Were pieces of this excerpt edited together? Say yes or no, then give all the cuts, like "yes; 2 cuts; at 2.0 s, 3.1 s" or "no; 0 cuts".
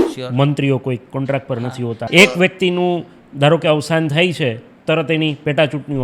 yes; 1 cut; at 2.1 s